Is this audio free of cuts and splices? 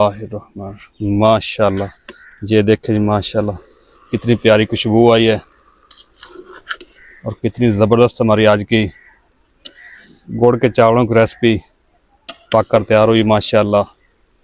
yes; 0 cuts

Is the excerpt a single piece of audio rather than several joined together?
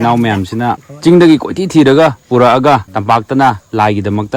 no; 2 cuts; at 0.9 s, 2.9 s

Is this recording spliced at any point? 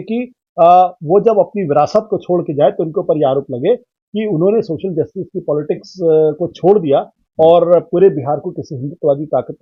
no; 0 cuts

